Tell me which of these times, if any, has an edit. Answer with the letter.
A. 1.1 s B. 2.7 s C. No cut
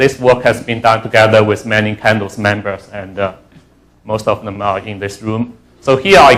C